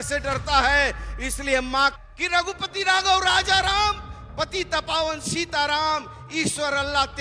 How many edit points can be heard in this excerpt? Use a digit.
1